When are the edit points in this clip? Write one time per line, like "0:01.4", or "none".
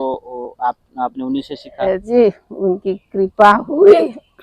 0:02.1